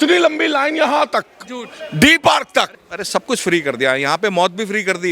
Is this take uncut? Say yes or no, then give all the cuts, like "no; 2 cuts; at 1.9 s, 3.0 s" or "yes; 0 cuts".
no; 1 cut; at 2.8 s